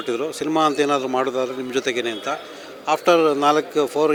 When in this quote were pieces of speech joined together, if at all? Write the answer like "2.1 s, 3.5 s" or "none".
none